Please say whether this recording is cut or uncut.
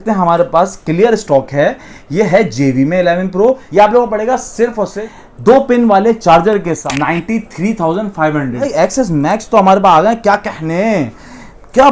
cut